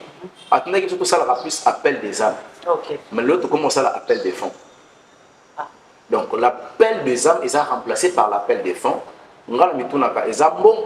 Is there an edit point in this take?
no; 0 cuts

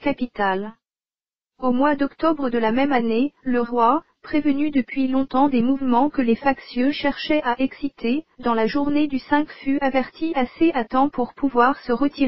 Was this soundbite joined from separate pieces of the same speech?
yes; 1 cut; at 7.8 s

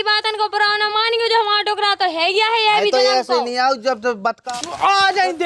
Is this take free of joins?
no; 1 cut; at 4.4 s

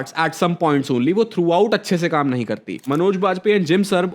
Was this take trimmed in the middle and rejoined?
yes; 1 cut; at 2.8 s

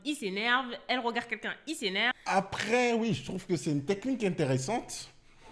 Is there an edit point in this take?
yes; 1 cut; at 2.1 s

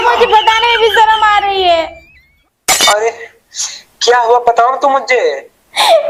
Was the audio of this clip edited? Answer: no; 0 cuts

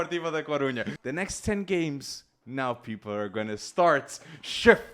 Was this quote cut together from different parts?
yes; 1 cut; at 0.9 s

